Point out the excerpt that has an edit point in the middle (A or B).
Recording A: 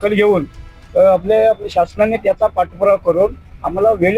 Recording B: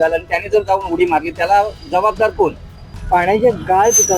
B